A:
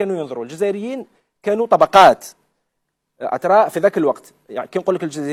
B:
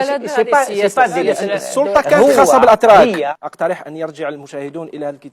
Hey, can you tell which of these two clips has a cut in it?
B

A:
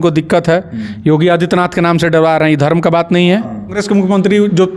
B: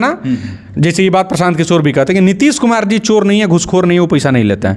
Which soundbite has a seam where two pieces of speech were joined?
A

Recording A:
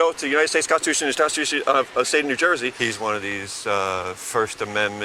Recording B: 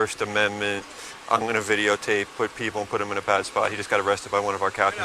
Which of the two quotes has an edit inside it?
A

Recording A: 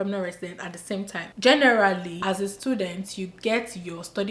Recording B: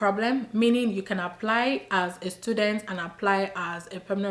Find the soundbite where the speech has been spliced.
A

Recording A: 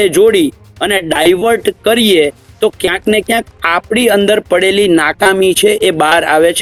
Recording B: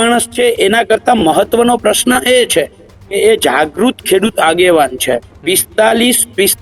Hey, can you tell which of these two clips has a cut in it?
B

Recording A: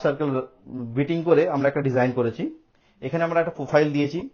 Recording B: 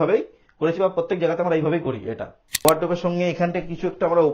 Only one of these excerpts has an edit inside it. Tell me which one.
B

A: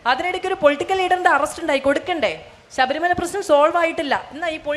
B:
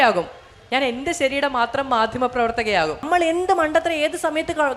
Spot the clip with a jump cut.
B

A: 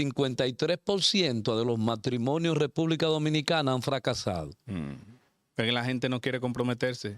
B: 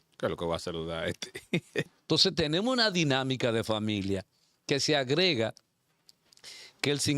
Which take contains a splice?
B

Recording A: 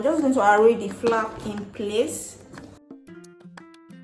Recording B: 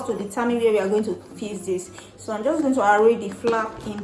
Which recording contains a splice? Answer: A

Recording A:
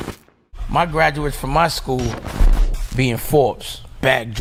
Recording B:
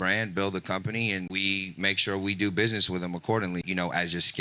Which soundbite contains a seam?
B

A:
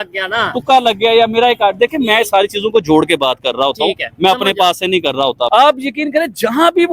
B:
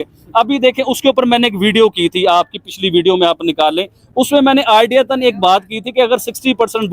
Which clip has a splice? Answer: A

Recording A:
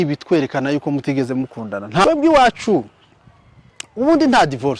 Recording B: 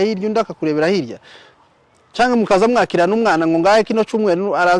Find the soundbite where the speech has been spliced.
A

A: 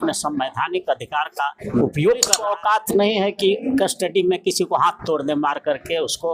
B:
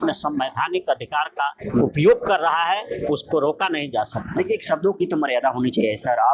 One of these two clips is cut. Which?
A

